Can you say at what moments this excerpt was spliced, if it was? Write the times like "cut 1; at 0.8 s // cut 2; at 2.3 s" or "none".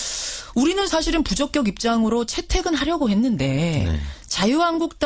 none